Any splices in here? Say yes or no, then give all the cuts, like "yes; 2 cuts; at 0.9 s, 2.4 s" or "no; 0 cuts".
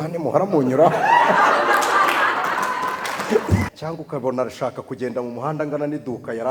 yes; 1 cut; at 3.7 s